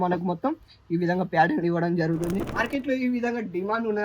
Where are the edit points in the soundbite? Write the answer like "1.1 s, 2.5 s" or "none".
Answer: 2.6 s